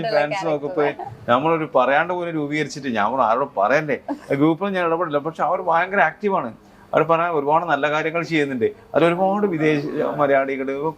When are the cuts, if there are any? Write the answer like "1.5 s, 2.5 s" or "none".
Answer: none